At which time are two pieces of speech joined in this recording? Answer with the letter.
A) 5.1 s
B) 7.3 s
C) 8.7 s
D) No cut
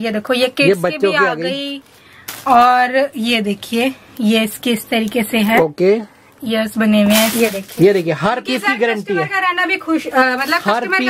B